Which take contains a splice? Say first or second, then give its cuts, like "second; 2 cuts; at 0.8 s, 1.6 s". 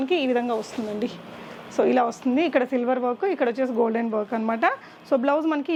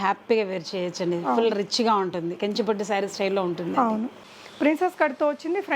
second; 1 cut; at 4.2 s